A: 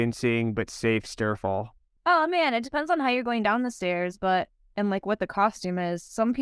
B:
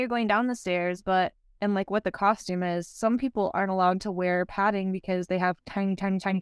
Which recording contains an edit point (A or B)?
A